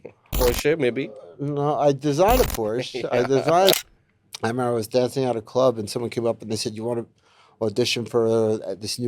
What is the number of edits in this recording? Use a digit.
1